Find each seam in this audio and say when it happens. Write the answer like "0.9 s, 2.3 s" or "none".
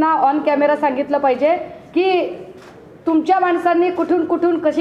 none